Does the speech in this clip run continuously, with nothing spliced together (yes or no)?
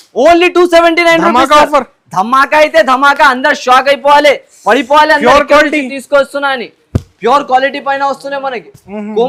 yes